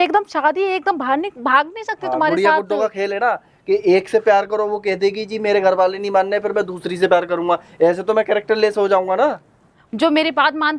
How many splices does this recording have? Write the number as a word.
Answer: one